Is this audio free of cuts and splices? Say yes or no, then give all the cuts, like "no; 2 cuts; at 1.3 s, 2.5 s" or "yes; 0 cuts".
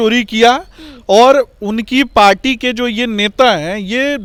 yes; 0 cuts